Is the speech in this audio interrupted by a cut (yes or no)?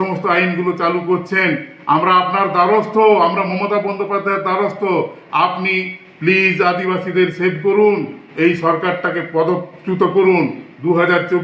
no